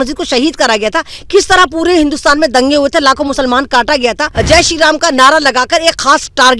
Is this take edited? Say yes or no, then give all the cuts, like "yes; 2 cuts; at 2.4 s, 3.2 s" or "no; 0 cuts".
yes; 1 cut; at 4.3 s